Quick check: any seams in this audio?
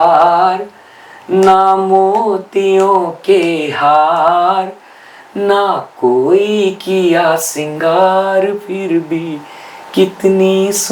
no; 0 cuts

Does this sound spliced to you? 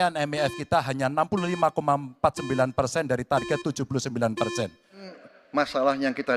yes; 1 cut; at 5.1 s

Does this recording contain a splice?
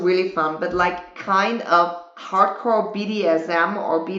no; 0 cuts

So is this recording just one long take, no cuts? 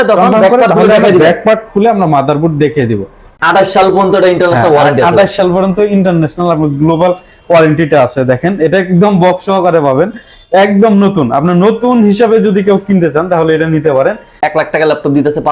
no; 2 cuts; at 3.3 s, 14.4 s

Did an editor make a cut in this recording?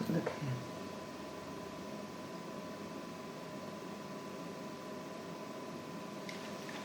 yes; 1 cut; at 5.3 s

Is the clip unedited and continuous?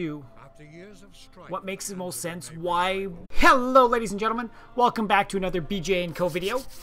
yes; 0 cuts

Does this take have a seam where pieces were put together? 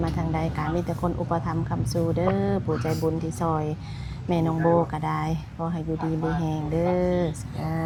no; 0 cuts

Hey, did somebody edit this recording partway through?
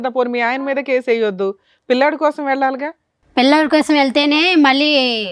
no; 0 cuts

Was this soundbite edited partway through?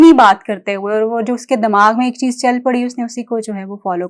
no; 0 cuts

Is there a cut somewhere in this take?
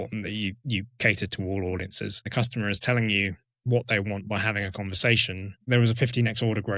yes; 2 cuts; at 2.3 s, 5.7 s

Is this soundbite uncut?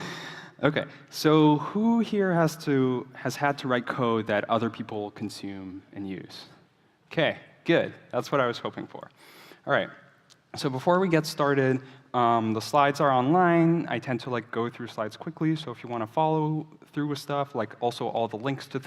no; 1 cut; at 4.2 s

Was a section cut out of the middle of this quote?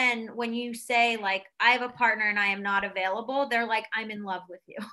no; 0 cuts

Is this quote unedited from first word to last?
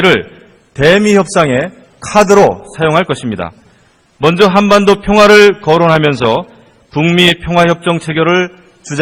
no; 1 cut; at 4.6 s

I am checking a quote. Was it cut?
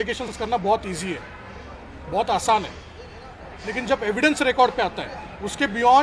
no; 0 cuts

